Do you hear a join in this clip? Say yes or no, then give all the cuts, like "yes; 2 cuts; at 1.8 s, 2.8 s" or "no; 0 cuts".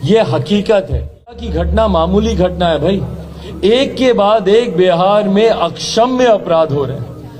yes; 1 cut; at 1.5 s